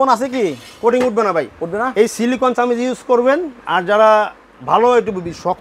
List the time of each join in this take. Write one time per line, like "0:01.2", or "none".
none